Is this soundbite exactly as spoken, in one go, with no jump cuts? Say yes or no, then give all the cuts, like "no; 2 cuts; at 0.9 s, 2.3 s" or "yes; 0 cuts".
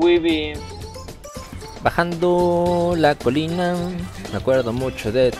yes; 0 cuts